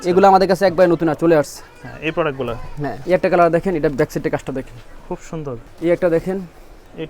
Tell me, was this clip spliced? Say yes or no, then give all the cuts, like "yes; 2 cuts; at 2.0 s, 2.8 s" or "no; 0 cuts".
yes; 2 cuts; at 3.0 s, 5.6 s